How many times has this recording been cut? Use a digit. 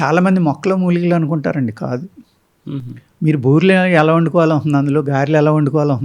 0